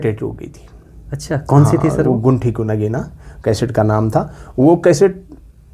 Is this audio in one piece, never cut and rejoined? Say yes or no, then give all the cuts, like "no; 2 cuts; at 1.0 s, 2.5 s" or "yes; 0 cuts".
yes; 0 cuts